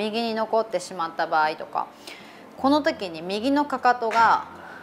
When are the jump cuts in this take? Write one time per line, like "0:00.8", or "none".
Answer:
none